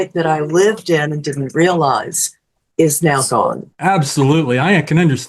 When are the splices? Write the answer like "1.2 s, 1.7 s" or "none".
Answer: 3.7 s